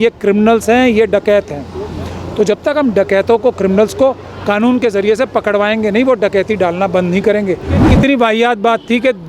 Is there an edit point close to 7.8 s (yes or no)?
yes